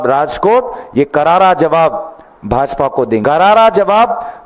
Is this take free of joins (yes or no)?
no